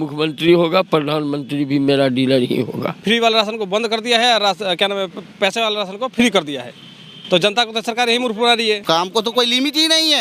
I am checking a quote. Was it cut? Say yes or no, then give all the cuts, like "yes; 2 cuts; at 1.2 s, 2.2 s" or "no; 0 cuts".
yes; 2 cuts; at 3.0 s, 8.8 s